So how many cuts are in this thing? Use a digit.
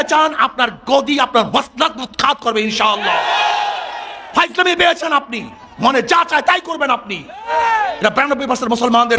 0